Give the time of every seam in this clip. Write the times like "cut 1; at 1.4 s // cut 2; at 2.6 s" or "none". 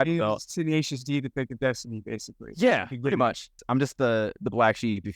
cut 1; at 3.6 s